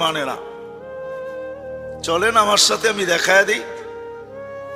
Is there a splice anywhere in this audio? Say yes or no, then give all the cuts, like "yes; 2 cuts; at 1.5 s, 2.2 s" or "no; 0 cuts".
no; 0 cuts